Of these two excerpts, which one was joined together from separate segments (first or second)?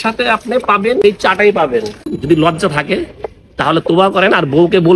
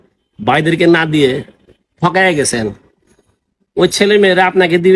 first